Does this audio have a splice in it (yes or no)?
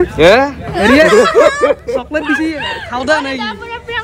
no